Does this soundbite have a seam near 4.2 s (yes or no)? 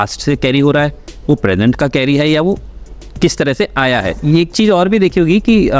yes